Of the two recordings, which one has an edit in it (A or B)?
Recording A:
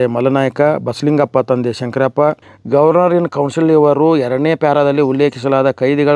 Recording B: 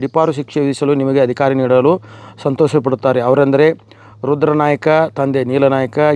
A